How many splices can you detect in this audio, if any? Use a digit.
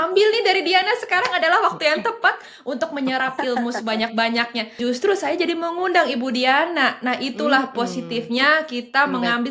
1